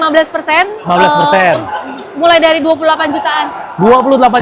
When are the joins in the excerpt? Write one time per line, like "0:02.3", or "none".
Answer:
none